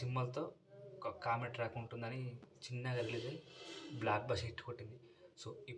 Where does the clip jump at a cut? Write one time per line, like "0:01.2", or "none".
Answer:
0:02.5